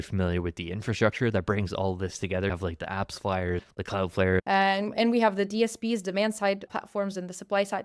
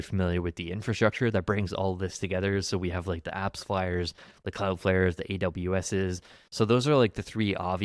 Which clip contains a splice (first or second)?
first